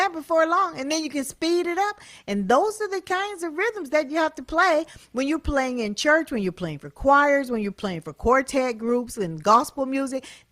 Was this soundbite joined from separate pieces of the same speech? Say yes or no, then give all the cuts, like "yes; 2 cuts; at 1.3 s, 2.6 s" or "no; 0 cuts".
no; 0 cuts